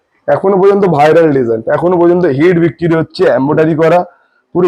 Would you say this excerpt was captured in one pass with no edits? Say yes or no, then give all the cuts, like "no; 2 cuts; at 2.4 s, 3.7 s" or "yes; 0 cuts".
yes; 0 cuts